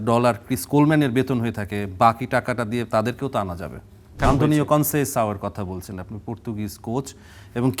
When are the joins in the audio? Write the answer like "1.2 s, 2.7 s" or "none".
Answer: 4.1 s